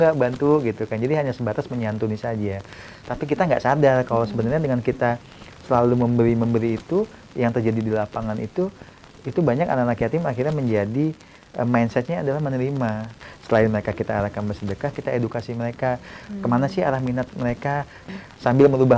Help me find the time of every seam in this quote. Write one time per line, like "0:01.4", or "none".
0:13.3
0:18.0

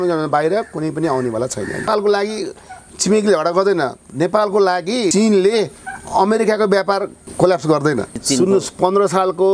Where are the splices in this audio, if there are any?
0:01.8
0:05.1
0:07.2
0:08.2

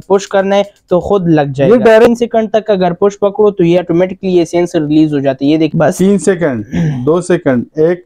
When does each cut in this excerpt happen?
0:02.0
0:05.7

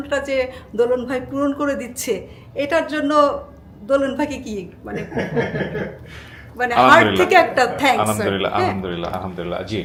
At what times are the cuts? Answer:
none

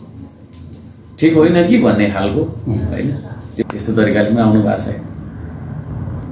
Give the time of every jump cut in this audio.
0:03.6

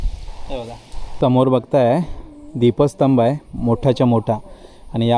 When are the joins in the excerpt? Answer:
0:01.1

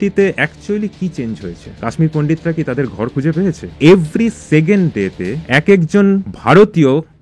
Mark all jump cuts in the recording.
0:01.6
0:03.7
0:05.3
0:06.3

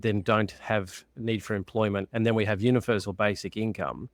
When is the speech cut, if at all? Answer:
none

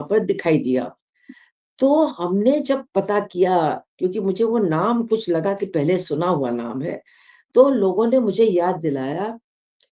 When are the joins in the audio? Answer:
none

